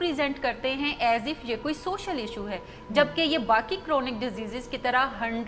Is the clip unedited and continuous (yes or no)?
yes